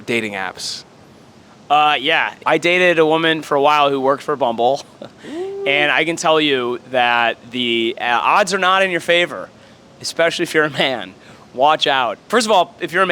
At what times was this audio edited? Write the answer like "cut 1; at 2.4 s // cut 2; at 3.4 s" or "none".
cut 1; at 2.3 s